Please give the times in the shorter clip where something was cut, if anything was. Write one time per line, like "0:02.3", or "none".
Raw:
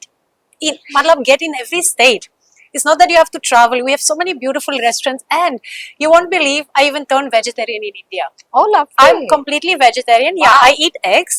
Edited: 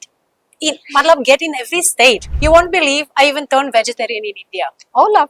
0:02.3